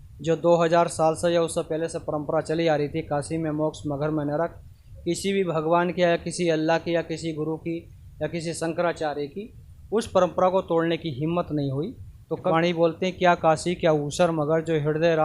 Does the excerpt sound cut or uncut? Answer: cut